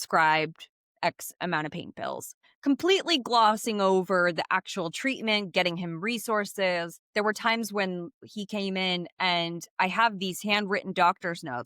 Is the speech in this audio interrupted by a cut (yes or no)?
yes